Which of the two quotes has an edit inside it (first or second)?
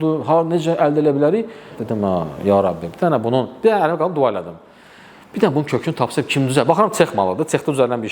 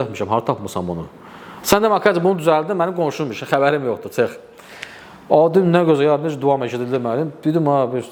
first